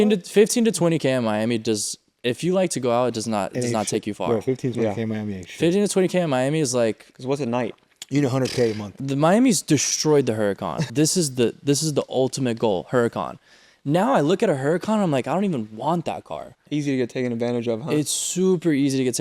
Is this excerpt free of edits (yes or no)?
no